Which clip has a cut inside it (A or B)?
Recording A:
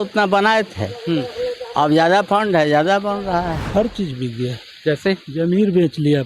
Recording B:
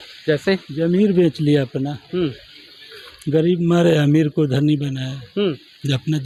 A